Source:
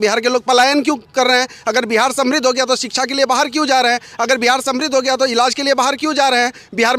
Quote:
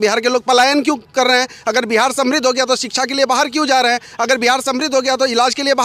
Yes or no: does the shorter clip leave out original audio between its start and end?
no